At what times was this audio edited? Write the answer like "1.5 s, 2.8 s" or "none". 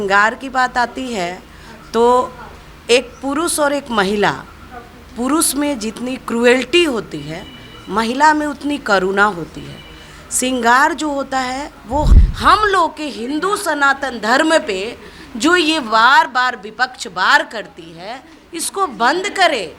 12.1 s

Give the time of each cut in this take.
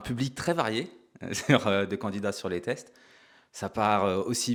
none

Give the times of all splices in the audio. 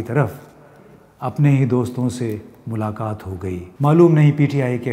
3.7 s

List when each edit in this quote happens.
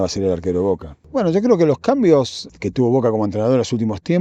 0.9 s, 2.4 s

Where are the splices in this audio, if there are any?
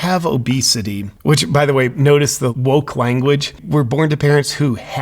2.5 s, 3.6 s

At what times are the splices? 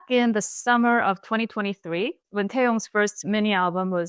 2.2 s

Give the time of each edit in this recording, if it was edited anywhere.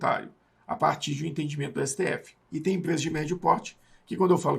2.3 s

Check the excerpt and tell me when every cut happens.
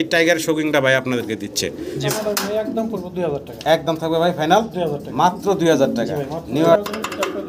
2.1 s, 6.8 s

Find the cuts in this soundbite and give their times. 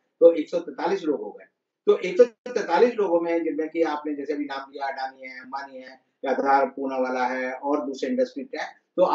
none

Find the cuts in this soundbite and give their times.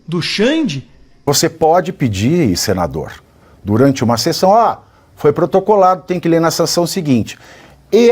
1.3 s

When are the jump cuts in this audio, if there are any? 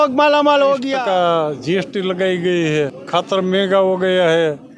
0.9 s, 3.0 s

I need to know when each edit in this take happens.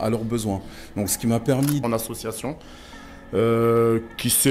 1.8 s

